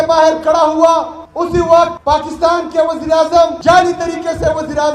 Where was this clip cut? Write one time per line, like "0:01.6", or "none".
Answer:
0:01.2
0:02.0
0:03.6